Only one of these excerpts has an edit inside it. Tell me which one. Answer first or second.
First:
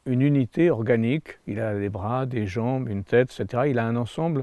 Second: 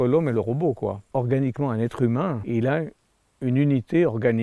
second